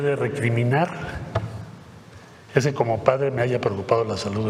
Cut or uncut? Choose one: uncut